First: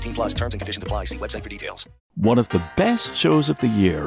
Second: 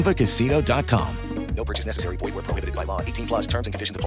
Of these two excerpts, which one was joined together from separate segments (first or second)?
first